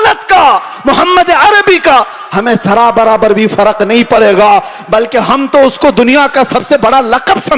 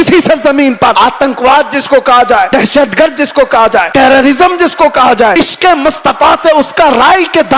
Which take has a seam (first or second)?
second